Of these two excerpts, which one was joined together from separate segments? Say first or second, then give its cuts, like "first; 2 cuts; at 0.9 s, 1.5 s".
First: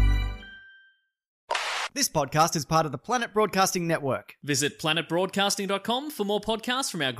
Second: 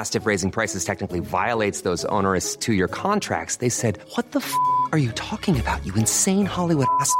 first; 1 cut; at 1.6 s